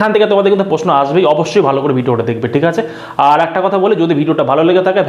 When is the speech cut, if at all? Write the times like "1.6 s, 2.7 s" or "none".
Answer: none

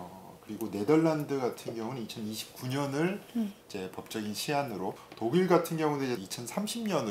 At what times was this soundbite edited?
5.1 s, 6.2 s

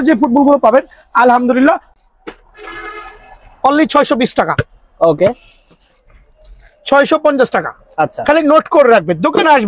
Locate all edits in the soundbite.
1.9 s

